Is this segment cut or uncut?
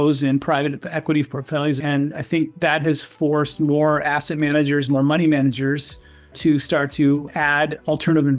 cut